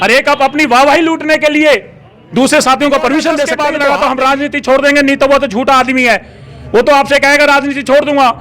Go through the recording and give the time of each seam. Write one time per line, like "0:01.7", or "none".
0:03.5